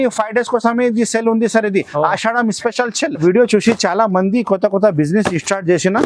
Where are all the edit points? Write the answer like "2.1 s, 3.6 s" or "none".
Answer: 3.2 s